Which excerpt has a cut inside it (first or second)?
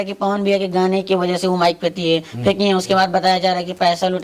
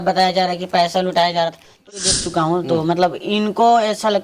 second